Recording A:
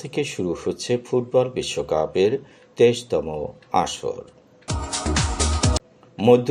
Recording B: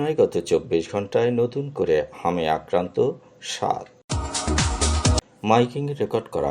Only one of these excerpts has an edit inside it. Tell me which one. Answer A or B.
B